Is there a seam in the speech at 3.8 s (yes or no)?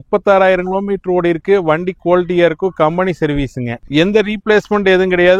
yes